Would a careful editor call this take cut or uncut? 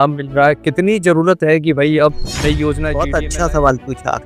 cut